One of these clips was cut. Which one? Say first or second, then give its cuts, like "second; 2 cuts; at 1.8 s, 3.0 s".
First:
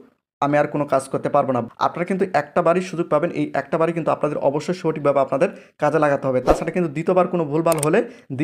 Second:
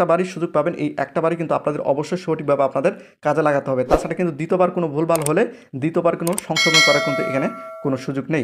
first; 1 cut; at 1.6 s